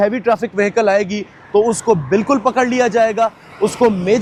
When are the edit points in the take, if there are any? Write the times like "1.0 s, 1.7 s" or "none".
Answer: none